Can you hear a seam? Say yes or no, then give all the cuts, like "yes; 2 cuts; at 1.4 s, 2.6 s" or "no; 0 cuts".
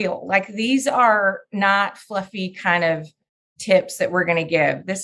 no; 0 cuts